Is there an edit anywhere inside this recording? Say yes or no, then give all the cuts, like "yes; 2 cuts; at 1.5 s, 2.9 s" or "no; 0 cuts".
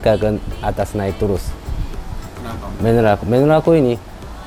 no; 0 cuts